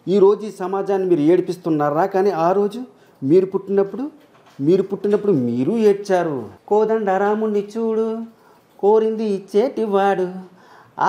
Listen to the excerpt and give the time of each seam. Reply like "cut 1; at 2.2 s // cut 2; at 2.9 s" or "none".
cut 1; at 6.5 s